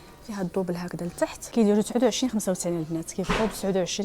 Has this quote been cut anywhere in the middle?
no; 0 cuts

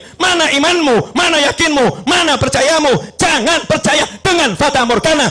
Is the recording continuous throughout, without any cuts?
yes; 0 cuts

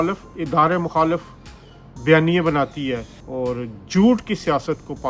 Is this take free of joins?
yes; 0 cuts

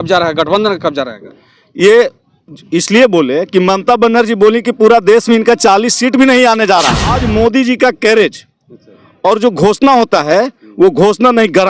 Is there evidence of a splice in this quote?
yes; 1 cut; at 7.1 s

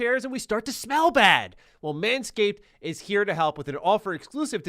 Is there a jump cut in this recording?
yes; 1 cut; at 1.7 s

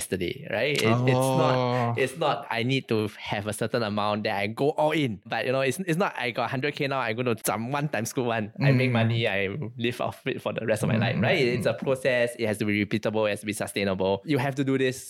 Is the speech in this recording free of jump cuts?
yes; 0 cuts

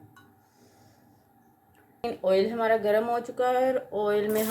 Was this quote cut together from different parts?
yes; 1 cut; at 2.0 s

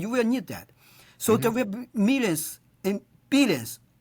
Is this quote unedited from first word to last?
yes; 0 cuts

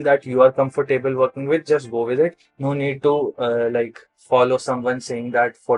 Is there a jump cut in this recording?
no; 0 cuts

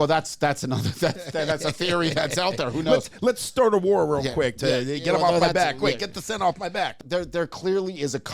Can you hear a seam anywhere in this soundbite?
yes; 1 cut; at 6.9 s

